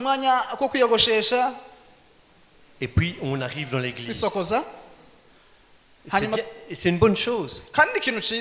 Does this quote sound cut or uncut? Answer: uncut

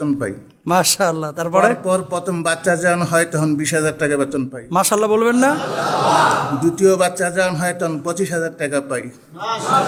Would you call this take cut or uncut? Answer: uncut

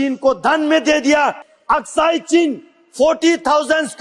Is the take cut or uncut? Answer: cut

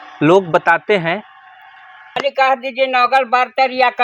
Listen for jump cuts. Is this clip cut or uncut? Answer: cut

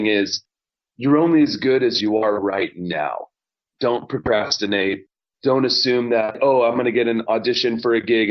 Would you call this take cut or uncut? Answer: cut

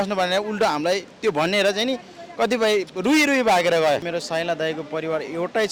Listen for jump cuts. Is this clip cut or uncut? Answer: cut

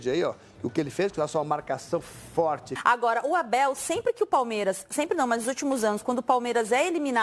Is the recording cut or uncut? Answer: cut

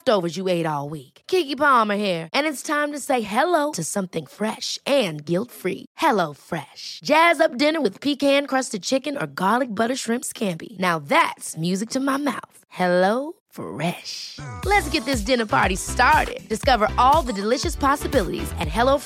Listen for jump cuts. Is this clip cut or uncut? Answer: uncut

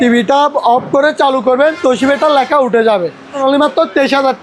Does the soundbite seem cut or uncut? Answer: cut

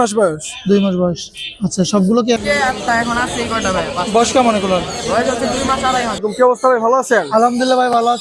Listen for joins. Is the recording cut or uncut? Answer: cut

